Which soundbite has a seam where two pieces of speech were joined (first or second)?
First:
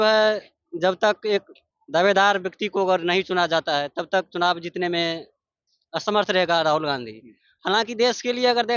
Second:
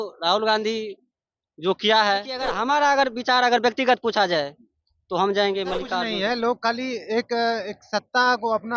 second